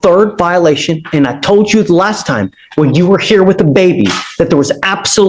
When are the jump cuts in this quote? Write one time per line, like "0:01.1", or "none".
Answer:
none